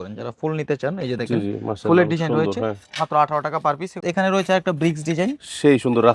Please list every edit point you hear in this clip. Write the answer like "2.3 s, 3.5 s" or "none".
4.0 s